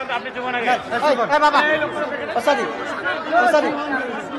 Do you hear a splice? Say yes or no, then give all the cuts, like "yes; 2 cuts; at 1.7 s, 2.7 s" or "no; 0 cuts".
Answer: no; 0 cuts